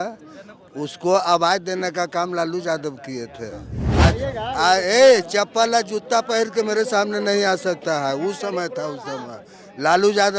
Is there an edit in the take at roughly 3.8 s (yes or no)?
yes